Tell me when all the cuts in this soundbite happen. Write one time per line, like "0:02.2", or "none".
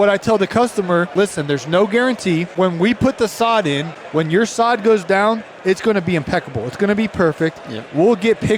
0:01.1
0:02.5
0:03.9